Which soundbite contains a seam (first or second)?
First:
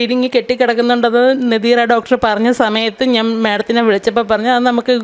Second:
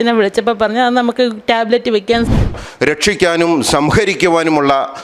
second